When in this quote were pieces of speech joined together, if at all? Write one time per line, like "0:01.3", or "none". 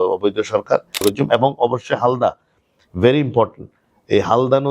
0:01.0